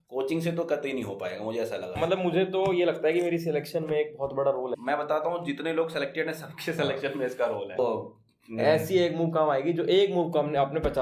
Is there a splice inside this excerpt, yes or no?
yes